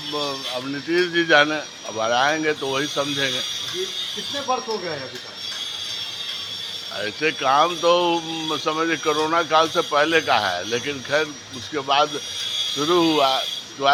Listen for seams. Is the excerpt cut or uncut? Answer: uncut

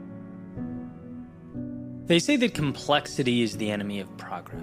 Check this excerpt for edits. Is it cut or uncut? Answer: cut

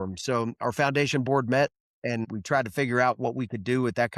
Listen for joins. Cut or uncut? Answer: cut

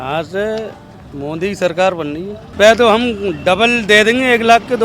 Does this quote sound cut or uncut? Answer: cut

